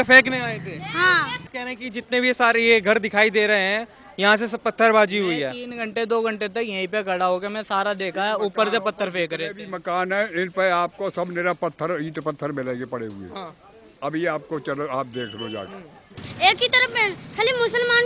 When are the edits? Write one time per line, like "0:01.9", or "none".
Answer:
0:01.5
0:16.2